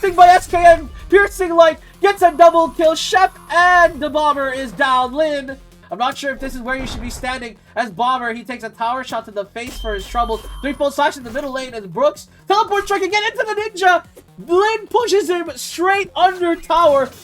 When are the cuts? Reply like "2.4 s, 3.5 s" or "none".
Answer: 5.8 s

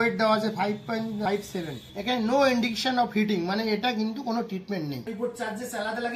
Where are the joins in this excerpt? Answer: 1.6 s, 5.1 s

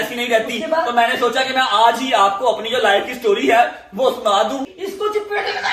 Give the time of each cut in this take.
4.7 s

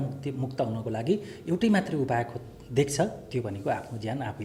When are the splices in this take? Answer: none

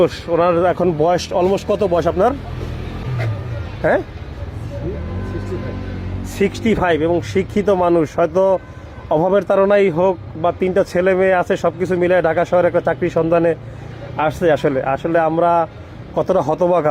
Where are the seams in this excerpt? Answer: 3.0 s

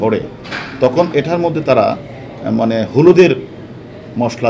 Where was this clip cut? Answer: none

